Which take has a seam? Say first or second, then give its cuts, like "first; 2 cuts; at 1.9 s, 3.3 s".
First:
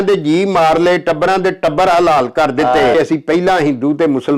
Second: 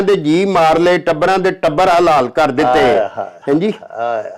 first; 1 cut; at 2.9 s